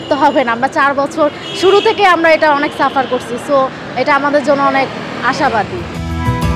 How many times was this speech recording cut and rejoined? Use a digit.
0